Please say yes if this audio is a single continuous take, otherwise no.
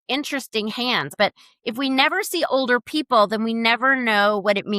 no